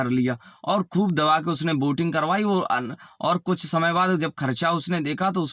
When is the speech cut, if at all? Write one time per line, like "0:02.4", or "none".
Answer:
none